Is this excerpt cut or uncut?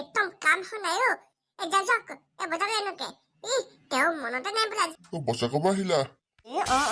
cut